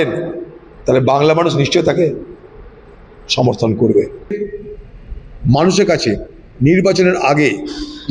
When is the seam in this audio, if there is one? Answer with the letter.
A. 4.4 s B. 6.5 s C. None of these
A